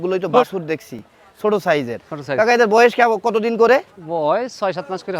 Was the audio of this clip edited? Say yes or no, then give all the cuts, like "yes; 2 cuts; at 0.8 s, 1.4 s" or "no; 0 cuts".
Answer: no; 0 cuts